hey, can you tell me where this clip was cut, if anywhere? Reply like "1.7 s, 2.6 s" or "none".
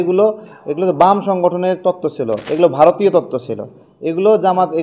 2.4 s